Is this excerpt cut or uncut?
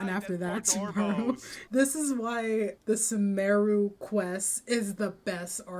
cut